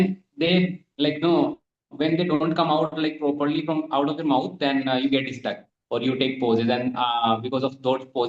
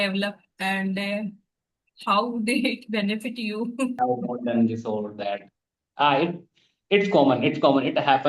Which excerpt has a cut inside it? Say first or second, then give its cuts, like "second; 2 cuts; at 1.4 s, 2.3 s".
second; 1 cut; at 4.0 s